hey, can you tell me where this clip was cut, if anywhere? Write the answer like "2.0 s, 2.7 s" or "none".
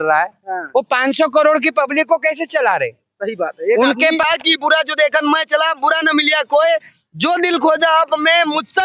4.2 s